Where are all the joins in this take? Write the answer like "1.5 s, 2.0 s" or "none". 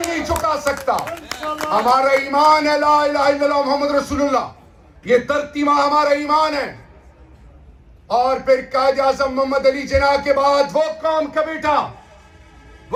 none